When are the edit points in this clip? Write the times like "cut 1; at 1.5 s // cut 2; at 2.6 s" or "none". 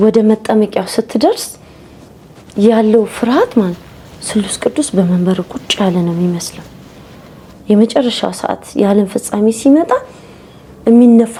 none

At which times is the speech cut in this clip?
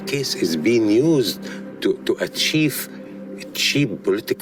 none

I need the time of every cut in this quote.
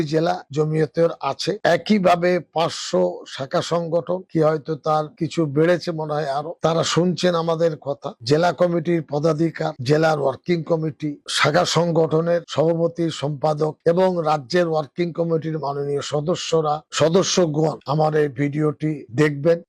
none

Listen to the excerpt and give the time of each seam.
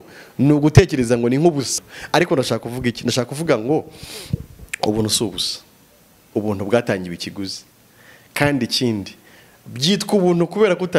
cut 1; at 1.8 s

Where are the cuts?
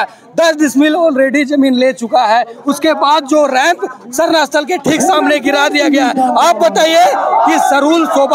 none

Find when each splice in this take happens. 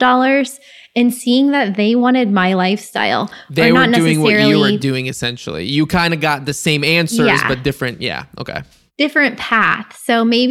none

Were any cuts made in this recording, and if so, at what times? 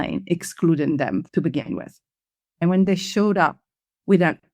cut 1; at 1.3 s // cut 2; at 2.6 s

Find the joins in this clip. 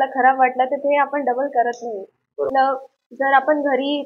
cut 1; at 2.5 s

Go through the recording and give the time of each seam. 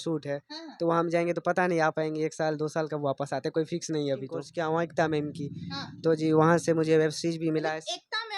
cut 1; at 4.5 s

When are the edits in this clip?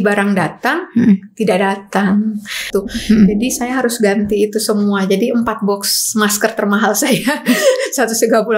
cut 1; at 2.6 s

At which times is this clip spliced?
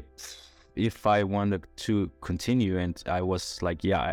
none

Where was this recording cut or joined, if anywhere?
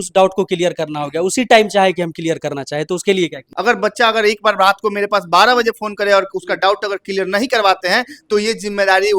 cut 1; at 3.5 s

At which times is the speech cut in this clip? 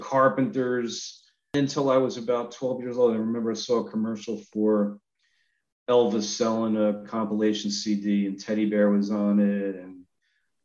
cut 1; at 1.5 s

